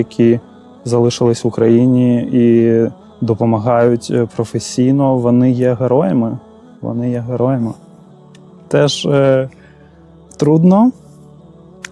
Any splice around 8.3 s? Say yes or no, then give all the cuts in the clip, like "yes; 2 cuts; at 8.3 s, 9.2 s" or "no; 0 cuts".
no; 0 cuts